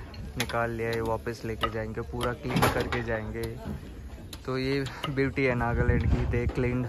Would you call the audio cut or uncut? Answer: uncut